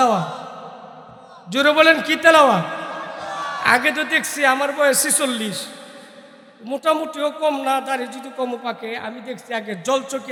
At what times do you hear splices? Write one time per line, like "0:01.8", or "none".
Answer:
none